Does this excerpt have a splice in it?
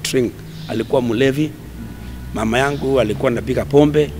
no; 0 cuts

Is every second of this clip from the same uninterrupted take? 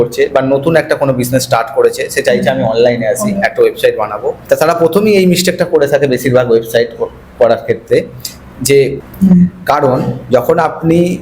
no; 2 cuts; at 4.3 s, 9.0 s

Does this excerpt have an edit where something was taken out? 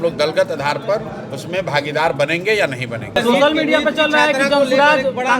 yes; 1 cut; at 3.1 s

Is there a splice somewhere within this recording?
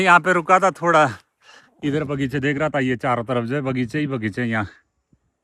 no; 0 cuts

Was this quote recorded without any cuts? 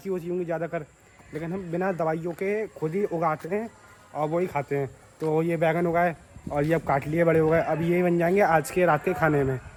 yes; 0 cuts

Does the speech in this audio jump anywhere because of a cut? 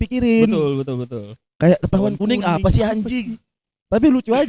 no; 0 cuts

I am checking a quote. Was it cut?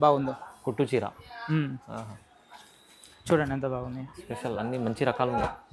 no; 0 cuts

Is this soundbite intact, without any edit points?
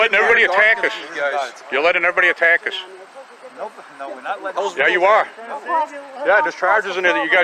yes; 0 cuts

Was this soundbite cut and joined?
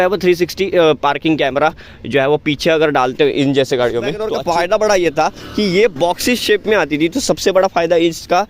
yes; 1 cut; at 4.3 s

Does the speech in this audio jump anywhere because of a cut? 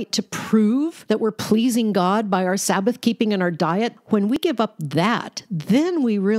yes; 2 cuts; at 1.0 s, 4.4 s

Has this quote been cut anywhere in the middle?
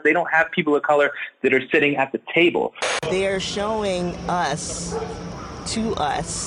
yes; 1 cut; at 2.9 s

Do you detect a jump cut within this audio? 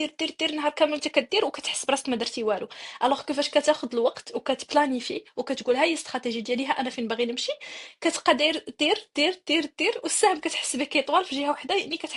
no; 0 cuts

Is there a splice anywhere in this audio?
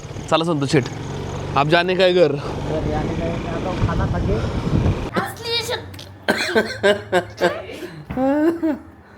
yes; 1 cut; at 5.1 s

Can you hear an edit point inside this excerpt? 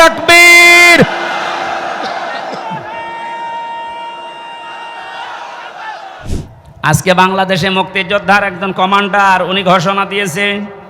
yes; 1 cut; at 6.3 s

